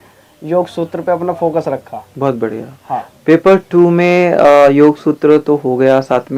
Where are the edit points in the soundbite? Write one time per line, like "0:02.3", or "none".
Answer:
none